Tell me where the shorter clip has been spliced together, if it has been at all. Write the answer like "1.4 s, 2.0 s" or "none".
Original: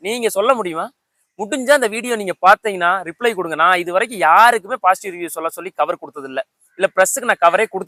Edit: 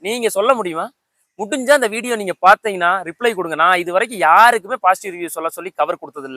none